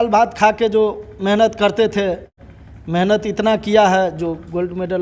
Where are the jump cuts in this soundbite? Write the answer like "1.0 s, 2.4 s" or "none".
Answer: 2.3 s